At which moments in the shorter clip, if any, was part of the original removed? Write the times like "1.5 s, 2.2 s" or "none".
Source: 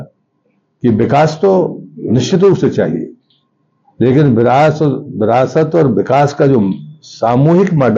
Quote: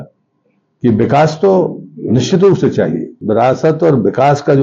3.1 s